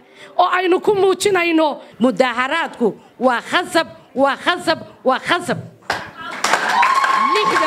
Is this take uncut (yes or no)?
no